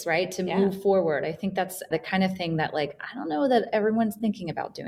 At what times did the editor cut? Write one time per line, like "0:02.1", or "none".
none